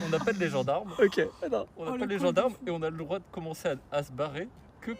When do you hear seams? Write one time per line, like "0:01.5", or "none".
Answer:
none

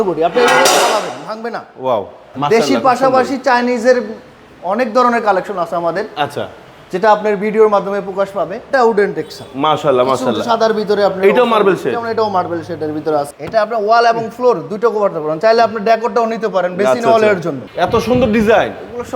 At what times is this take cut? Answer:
0:02.3
0:08.6
0:13.3
0:17.6

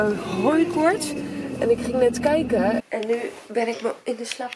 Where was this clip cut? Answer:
0:02.8

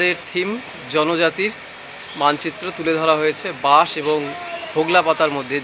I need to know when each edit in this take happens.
none

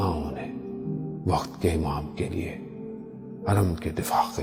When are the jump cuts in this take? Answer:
none

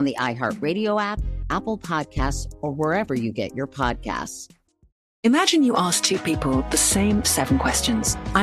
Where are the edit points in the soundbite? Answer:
0:05.1

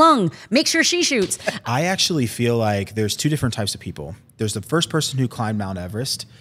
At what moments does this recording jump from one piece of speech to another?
0:01.6

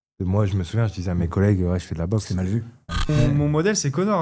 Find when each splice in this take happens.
0:03.1

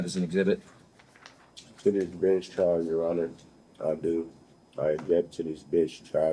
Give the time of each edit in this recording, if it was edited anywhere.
none

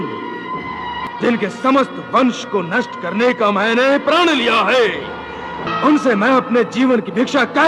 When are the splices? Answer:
0:01.0
0:05.7

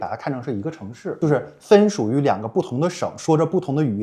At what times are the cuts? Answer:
0:01.2

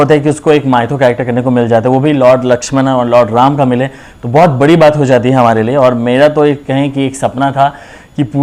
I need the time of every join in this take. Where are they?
none

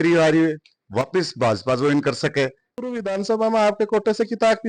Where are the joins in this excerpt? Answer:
0:02.8

